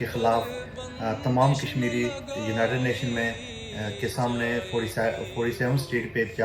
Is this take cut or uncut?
cut